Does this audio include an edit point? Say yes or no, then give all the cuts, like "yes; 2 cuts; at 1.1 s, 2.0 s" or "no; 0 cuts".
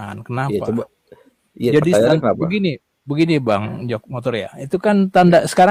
no; 0 cuts